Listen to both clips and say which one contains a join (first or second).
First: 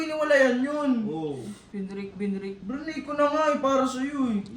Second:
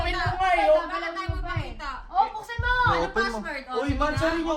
first